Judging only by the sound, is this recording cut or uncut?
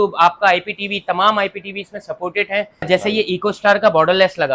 cut